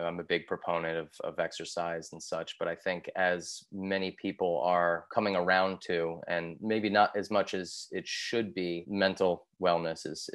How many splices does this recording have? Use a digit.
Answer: 2